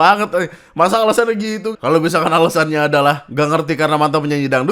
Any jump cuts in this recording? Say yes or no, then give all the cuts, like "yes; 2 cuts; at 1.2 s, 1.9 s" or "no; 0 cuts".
yes; 2 cuts; at 1.7 s, 3.2 s